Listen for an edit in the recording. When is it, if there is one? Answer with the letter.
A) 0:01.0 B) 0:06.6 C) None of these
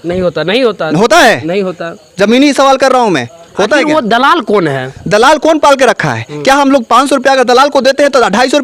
C